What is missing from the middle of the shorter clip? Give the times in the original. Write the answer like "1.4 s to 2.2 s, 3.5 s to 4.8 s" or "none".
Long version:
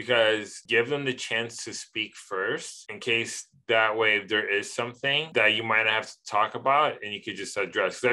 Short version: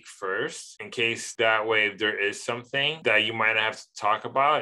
3.3 s to 3.6 s